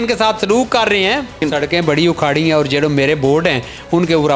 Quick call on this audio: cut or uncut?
cut